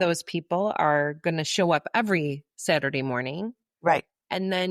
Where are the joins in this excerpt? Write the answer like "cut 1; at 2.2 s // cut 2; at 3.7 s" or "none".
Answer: none

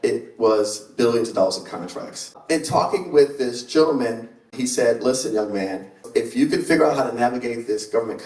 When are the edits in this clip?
cut 1; at 2.3 s // cut 2; at 4.5 s // cut 3; at 6.1 s

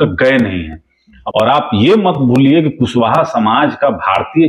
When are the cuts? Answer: cut 1; at 1.1 s

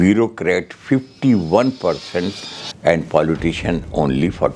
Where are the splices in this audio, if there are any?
none

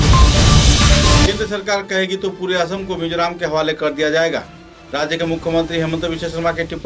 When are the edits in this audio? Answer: cut 1; at 1.2 s

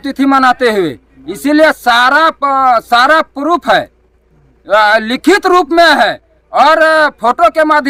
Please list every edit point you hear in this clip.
none

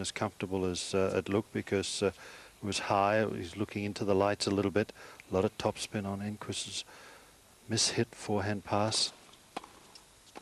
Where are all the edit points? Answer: cut 1; at 1.5 s

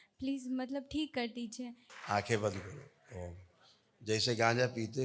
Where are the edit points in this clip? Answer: cut 1; at 1.8 s

